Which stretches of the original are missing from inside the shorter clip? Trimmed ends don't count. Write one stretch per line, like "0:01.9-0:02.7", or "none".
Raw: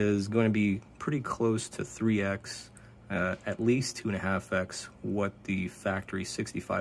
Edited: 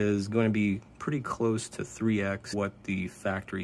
0:02.5-0:05.1